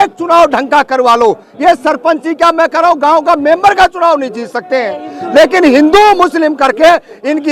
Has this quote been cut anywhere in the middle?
no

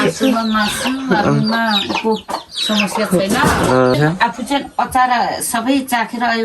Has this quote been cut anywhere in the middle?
yes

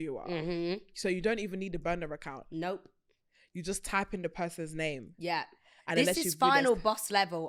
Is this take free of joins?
yes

